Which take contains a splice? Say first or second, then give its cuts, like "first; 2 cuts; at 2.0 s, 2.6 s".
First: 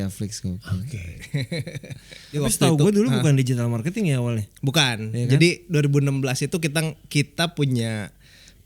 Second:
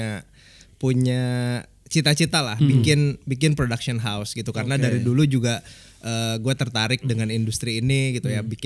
first; 1 cut; at 2.4 s